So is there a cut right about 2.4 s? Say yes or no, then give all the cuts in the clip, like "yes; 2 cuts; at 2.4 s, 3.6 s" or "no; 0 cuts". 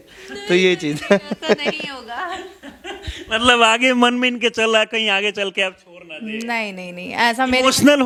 no; 0 cuts